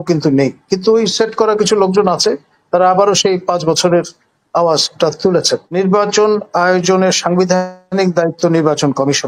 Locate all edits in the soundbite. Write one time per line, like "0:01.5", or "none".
0:05.7